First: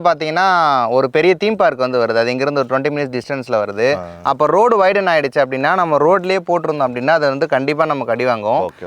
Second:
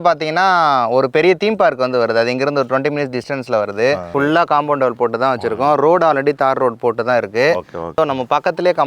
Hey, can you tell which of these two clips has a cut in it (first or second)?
second